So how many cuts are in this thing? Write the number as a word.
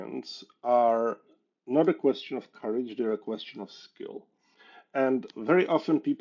one